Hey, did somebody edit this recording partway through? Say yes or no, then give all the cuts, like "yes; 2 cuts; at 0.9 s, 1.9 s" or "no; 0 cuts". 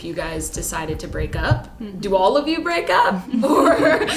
no; 0 cuts